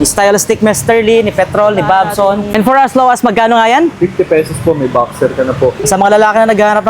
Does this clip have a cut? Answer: yes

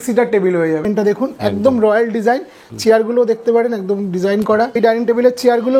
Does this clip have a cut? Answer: yes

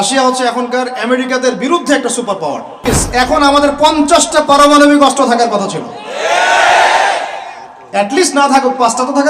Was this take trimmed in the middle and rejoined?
yes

